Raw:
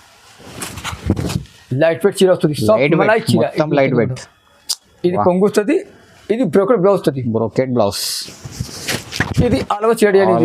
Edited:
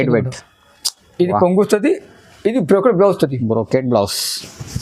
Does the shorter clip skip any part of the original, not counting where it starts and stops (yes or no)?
no